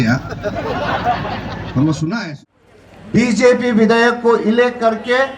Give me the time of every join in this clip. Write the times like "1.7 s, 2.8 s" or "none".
2.2 s